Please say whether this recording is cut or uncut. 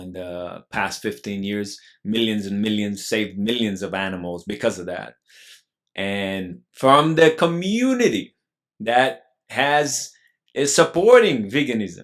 uncut